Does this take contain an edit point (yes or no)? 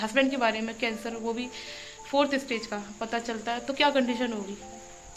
no